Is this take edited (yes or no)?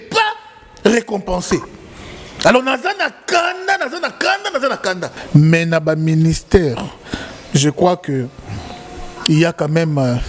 yes